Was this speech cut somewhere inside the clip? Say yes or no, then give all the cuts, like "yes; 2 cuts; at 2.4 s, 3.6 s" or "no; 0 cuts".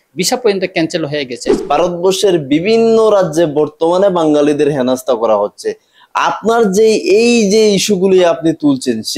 yes; 1 cut; at 1.5 s